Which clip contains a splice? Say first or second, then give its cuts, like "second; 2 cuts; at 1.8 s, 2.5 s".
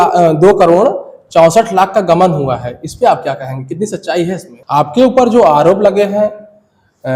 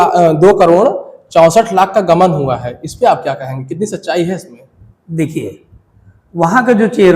first; 1 cut; at 4.5 s